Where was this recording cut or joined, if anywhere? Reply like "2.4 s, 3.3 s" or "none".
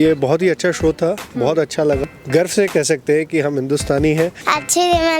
2.0 s, 4.4 s